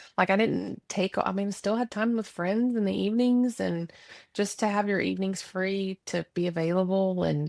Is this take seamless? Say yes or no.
yes